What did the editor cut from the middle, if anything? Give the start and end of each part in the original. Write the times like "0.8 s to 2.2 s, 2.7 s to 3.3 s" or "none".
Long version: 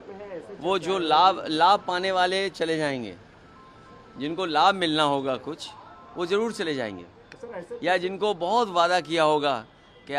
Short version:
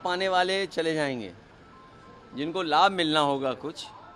none